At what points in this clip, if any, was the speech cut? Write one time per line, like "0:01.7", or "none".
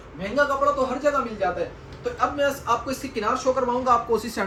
none